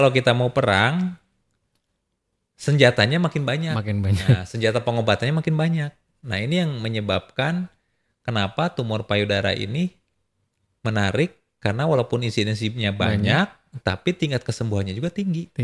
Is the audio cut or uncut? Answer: uncut